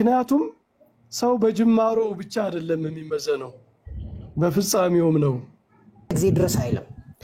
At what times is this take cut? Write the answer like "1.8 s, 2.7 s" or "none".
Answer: 6.1 s